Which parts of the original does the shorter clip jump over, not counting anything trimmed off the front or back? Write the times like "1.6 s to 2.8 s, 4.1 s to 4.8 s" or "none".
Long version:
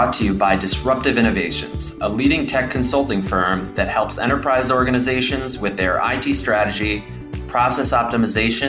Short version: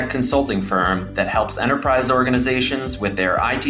none